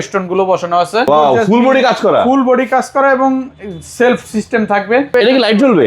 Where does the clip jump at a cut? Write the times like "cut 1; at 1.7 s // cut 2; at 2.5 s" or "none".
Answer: cut 1; at 1.1 s // cut 2; at 5.1 s